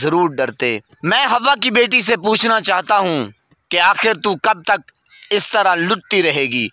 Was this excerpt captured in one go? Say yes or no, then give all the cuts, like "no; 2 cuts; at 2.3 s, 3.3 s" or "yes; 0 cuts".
no; 1 cut; at 0.9 s